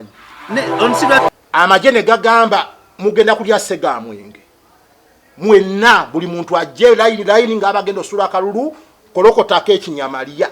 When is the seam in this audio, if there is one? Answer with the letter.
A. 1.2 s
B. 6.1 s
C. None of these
A